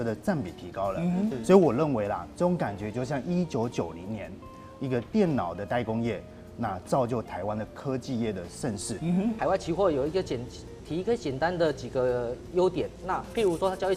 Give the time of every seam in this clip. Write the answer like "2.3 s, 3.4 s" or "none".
1.3 s, 9.4 s